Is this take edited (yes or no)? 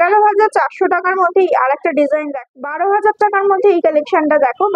yes